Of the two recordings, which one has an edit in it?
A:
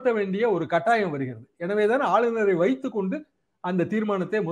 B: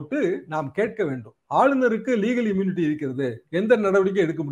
B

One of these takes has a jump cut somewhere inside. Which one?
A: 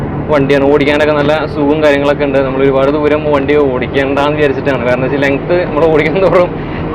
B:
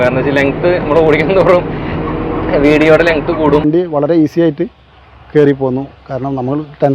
B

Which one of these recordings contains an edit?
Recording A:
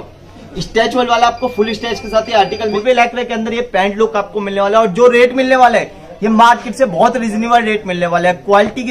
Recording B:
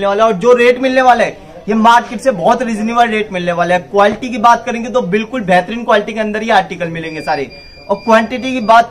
A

